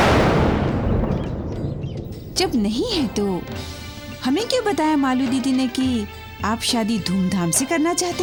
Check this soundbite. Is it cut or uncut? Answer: uncut